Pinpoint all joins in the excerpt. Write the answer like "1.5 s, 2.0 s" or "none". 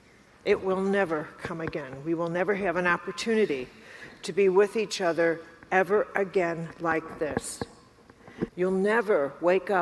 8.5 s